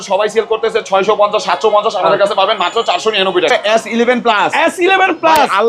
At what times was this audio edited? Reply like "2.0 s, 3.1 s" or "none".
3.5 s